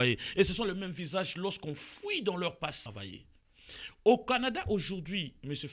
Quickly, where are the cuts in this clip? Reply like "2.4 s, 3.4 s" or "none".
2.8 s